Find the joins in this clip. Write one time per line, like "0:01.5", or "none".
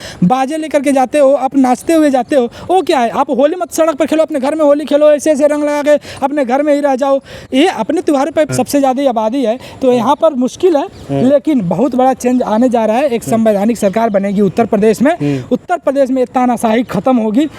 0:08.5